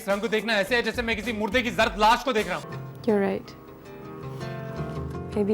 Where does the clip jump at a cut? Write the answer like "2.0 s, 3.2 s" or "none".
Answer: 2.6 s